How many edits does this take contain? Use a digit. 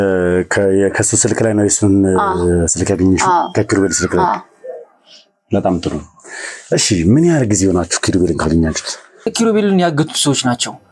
1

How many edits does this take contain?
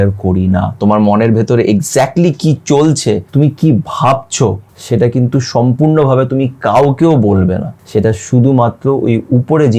3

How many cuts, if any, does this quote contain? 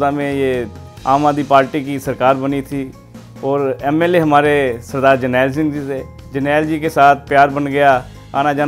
1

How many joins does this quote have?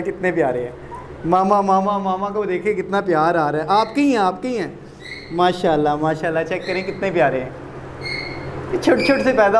0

